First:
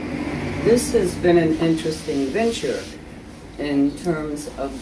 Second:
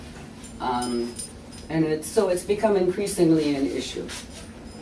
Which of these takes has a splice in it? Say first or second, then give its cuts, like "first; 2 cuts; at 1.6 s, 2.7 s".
second; 1 cut; at 1.6 s